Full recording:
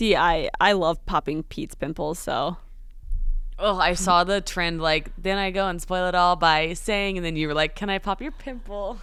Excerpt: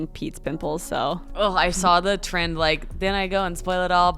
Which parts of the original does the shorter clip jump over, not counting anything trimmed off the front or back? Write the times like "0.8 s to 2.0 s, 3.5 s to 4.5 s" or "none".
2.6 s to 3.5 s